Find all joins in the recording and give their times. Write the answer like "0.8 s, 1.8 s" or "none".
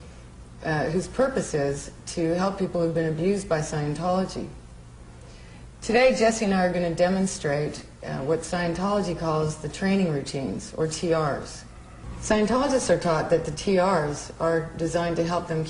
4.0 s